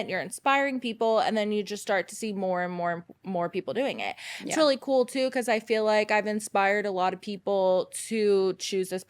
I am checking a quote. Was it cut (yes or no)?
no